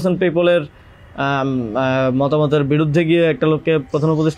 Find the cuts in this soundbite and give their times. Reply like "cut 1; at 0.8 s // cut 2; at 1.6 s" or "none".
none